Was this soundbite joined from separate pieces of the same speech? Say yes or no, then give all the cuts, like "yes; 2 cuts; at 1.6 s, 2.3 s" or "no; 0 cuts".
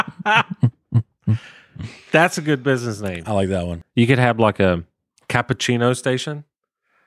yes; 1 cut; at 3.8 s